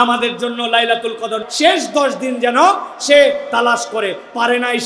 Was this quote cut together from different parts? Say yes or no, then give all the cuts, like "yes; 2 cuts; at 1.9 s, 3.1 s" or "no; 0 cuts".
yes; 1 cut; at 1.4 s